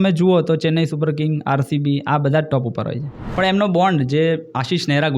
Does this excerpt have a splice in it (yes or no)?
yes